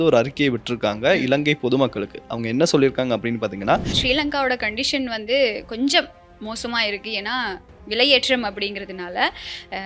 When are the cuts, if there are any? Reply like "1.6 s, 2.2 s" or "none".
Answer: 3.9 s